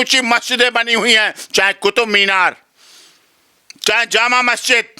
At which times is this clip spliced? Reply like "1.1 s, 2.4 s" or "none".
none